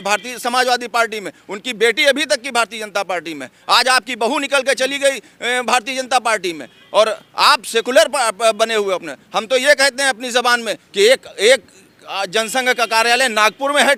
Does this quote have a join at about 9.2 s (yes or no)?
no